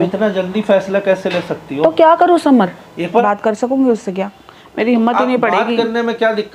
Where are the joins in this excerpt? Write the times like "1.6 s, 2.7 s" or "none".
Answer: 2.9 s